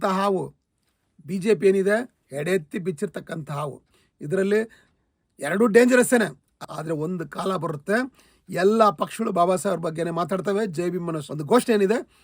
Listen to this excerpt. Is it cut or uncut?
cut